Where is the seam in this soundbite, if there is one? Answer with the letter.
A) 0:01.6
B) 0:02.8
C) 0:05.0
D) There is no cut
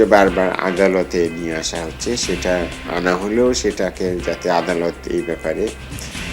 B